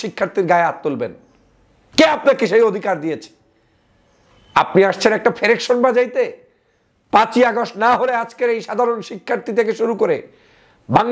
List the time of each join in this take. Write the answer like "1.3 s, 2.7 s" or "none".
none